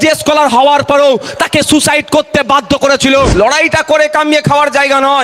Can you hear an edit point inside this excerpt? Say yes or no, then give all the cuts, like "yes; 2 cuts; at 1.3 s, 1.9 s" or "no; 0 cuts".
yes; 1 cut; at 3.3 s